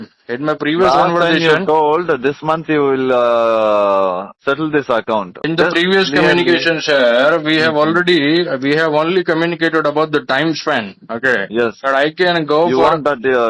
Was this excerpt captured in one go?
no; 1 cut; at 5.4 s

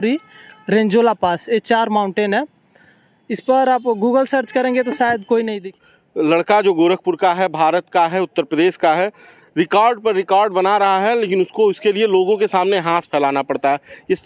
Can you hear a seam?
yes; 1 cut; at 5.6 s

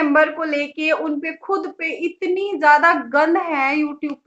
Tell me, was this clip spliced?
no; 0 cuts

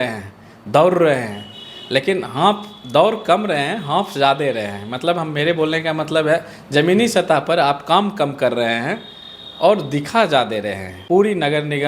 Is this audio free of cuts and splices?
no; 1 cut; at 10.9 s

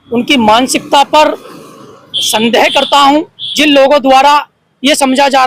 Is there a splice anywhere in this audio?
no; 0 cuts

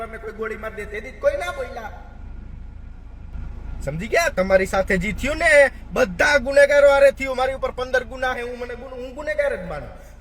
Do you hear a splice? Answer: yes; 1 cut; at 3.3 s

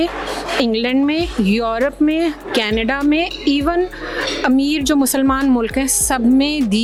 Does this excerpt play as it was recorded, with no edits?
yes; 0 cuts

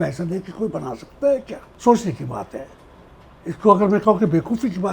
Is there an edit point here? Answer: yes; 1 cut; at 1.6 s

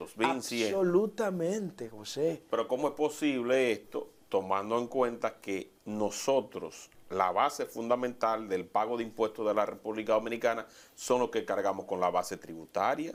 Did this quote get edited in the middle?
no; 0 cuts

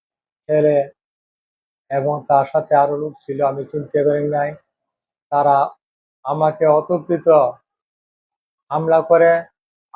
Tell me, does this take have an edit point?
no; 0 cuts

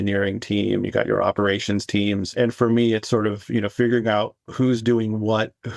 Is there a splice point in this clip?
yes; 1 cut; at 2.3 s

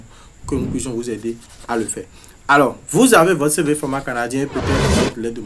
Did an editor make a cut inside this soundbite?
no; 0 cuts

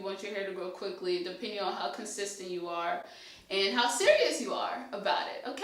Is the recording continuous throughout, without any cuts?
yes; 0 cuts

